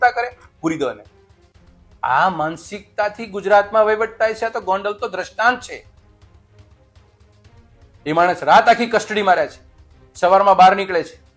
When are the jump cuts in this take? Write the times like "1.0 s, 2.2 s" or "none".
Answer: none